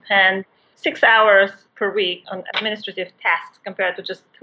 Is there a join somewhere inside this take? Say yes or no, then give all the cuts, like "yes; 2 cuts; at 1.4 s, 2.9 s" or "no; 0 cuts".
yes; 1 cut; at 2.2 s